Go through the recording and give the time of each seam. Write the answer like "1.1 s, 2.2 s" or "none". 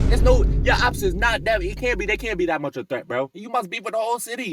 3.4 s